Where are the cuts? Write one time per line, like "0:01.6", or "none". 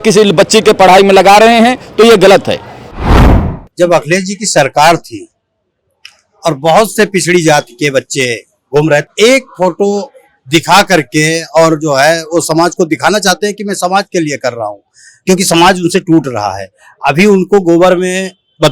0:03.1
0:09.0